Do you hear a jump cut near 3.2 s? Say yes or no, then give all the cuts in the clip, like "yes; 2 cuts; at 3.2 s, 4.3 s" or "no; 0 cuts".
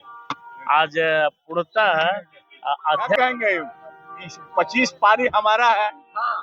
yes; 1 cut; at 3.2 s